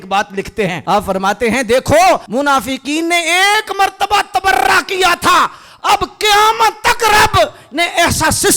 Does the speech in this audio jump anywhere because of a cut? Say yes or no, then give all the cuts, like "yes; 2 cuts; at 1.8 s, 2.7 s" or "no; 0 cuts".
yes; 2 cuts; at 0.8 s, 2.2 s